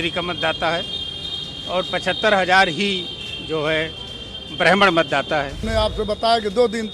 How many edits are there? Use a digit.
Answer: 1